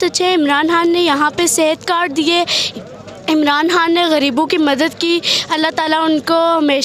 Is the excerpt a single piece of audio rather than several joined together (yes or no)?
yes